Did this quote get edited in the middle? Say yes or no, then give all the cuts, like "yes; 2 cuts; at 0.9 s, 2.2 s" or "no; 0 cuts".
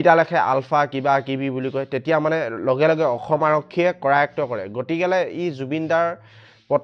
no; 0 cuts